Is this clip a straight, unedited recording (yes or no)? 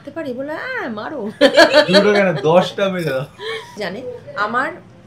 no